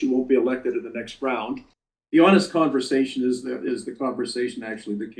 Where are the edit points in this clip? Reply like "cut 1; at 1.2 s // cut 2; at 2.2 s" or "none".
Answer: cut 1; at 1.9 s